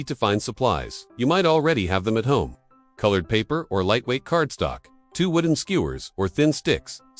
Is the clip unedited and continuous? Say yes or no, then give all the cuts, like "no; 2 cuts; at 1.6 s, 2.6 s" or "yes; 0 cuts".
yes; 0 cuts